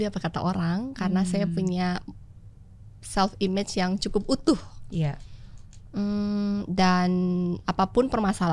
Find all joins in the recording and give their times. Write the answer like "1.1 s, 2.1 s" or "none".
none